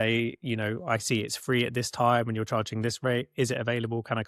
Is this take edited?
no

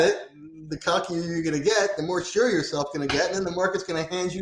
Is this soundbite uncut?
yes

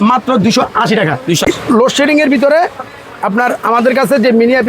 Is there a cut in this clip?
yes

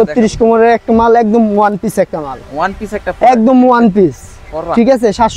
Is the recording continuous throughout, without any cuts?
yes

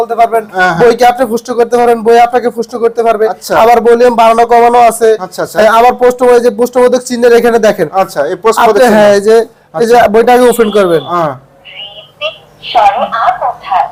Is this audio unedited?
yes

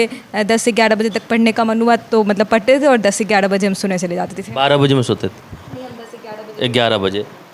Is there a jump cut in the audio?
no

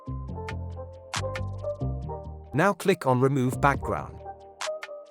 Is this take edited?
yes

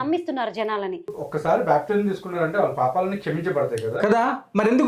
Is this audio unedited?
no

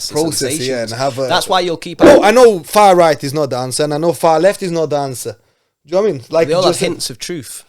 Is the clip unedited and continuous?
no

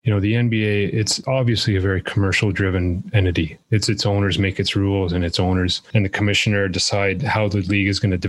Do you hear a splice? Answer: no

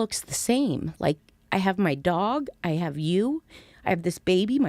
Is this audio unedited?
yes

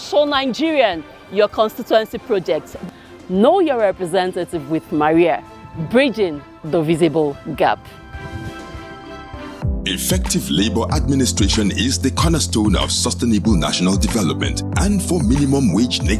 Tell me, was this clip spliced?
yes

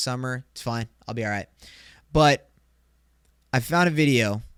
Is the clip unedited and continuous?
yes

